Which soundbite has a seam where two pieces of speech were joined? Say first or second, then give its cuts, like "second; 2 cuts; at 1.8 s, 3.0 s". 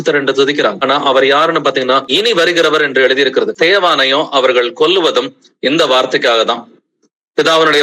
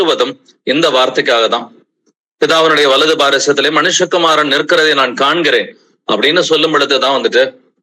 first; 3 cuts; at 0.8 s, 2.1 s, 3.5 s